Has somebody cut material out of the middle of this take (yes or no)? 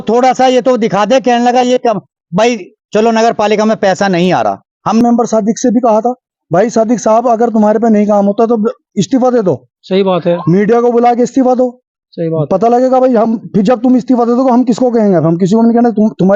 yes